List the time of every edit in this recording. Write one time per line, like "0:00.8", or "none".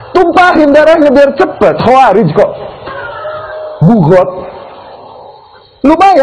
none